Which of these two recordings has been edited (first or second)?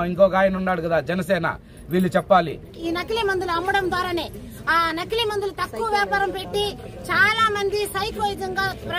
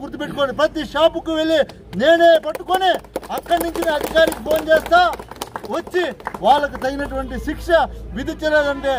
first